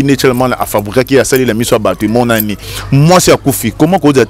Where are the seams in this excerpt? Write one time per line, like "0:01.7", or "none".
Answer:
0:02.6